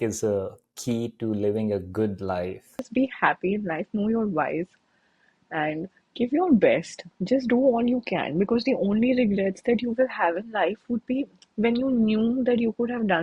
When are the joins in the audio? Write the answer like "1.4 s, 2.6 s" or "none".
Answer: 2.9 s